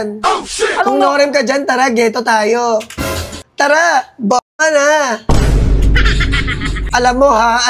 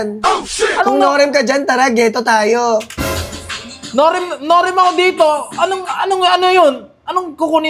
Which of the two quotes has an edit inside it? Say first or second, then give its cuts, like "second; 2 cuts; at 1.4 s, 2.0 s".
first; 2 cuts; at 3.4 s, 6.8 s